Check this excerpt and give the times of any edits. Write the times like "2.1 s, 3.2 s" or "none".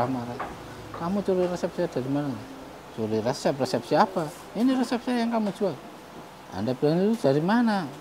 none